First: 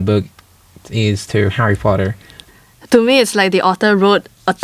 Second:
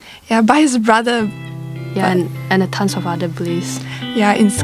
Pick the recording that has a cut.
first; 1 cut; at 2.3 s

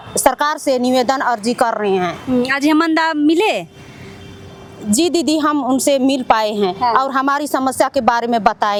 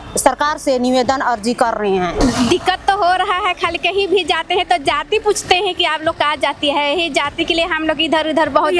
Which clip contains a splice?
second; 1 cut; at 2.2 s

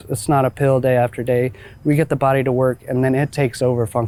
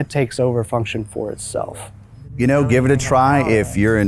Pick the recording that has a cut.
second; 1 cut; at 2.4 s

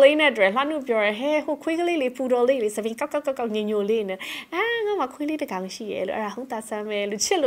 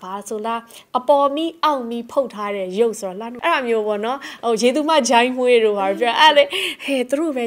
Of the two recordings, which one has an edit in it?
second; 1 cut; at 3.3 s

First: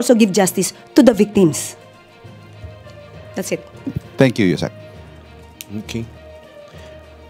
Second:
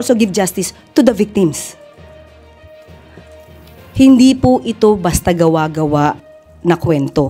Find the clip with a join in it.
second; 2 cuts; at 1.7 s, 3.4 s

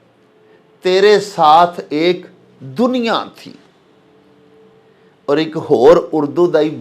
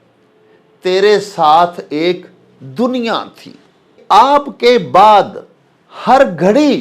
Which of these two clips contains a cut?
second; 1 cut; at 4.0 s

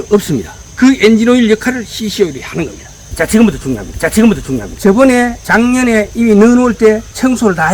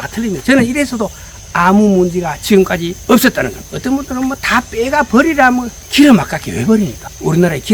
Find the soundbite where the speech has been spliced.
first; 1 cut; at 3.2 s

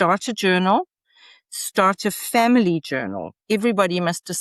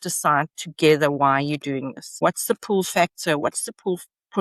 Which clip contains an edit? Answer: second; 1 cut; at 2.2 s

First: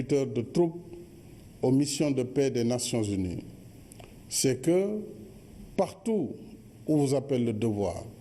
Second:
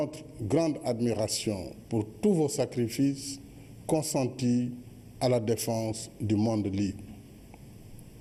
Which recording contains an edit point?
first; 1 cut; at 3.3 s

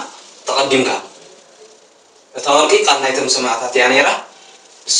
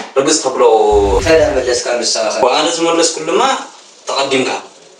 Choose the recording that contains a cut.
second; 1 cut; at 1.2 s

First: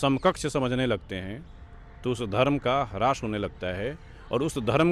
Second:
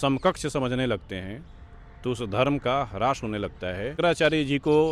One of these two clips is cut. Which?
second; 1 cut; at 3.9 s

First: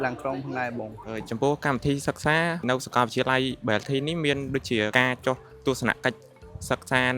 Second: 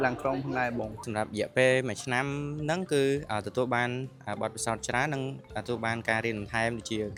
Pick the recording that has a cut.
first; 3 cuts; at 1.0 s, 2.6 s, 4.9 s

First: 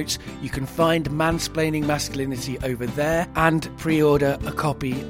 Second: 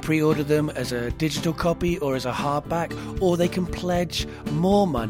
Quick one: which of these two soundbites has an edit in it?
first; 1 cut; at 3.5 s

